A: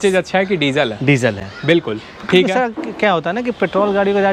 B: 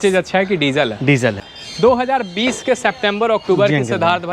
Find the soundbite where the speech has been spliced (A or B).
B